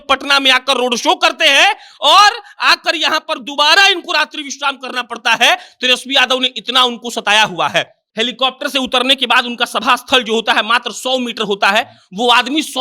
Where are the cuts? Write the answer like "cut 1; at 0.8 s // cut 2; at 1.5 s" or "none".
cut 1; at 8.0 s

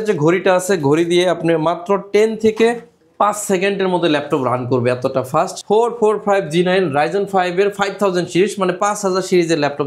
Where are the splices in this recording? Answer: cut 1; at 5.6 s

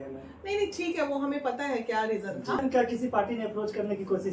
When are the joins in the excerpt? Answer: cut 1; at 2.6 s

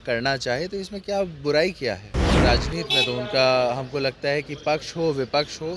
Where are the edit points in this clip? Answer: cut 1; at 2.3 s

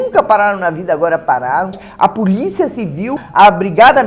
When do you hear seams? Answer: cut 1; at 1.8 s // cut 2; at 3.2 s

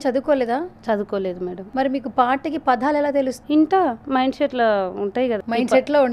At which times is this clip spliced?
cut 1; at 1.6 s // cut 2; at 3.4 s // cut 3; at 5.4 s

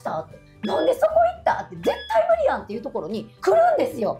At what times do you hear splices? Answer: none

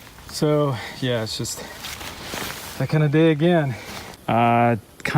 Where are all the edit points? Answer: cut 1; at 4.2 s

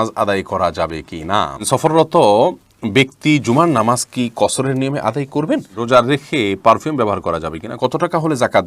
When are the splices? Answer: cut 1; at 1.6 s // cut 2; at 5.8 s // cut 3; at 7.7 s

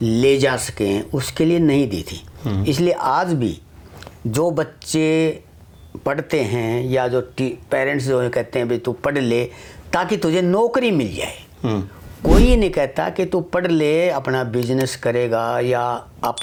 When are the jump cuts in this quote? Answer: none

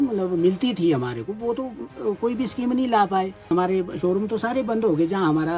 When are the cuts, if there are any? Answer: cut 1; at 3.5 s

